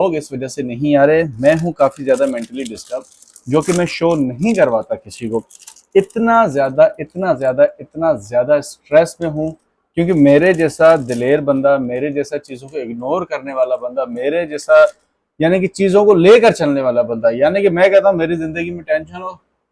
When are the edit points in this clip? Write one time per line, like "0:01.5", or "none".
none